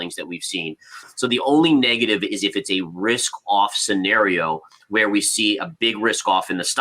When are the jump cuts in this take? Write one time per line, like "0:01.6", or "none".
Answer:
0:01.0